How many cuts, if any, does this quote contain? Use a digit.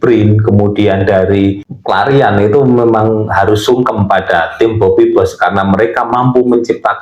1